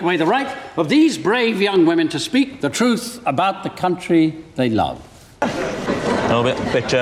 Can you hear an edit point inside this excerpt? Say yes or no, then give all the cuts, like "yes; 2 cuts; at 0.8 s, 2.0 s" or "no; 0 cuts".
no; 0 cuts